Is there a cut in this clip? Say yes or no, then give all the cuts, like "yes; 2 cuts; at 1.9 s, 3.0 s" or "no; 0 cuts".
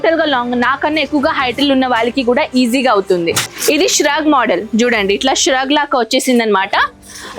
yes; 1 cut; at 3.5 s